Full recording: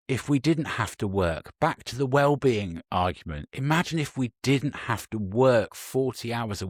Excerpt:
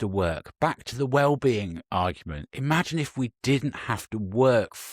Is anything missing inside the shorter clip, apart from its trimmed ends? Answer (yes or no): no